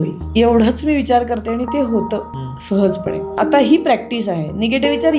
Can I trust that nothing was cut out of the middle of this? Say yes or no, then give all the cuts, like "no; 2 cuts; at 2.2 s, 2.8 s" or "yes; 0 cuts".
yes; 0 cuts